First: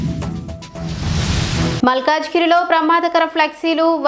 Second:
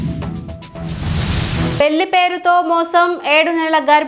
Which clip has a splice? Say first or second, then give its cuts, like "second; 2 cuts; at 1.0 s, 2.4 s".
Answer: second; 1 cut; at 1.8 s